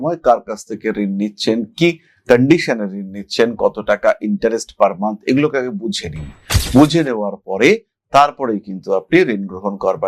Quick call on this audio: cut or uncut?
uncut